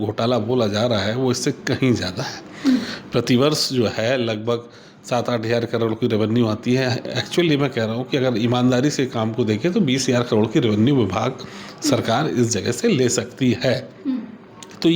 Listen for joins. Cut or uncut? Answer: uncut